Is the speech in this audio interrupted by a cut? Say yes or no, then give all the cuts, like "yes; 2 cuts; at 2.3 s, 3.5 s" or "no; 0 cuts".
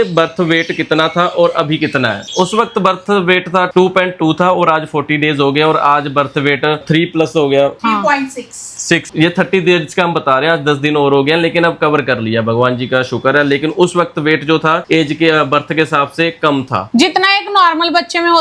no; 0 cuts